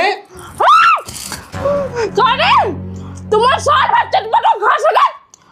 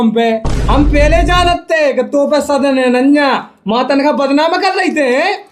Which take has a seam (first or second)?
first